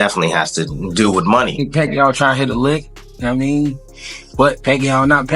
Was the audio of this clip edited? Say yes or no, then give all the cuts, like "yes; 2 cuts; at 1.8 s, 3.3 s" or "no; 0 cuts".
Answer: yes; 1 cut; at 1.7 s